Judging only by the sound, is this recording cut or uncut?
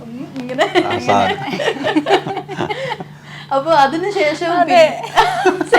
uncut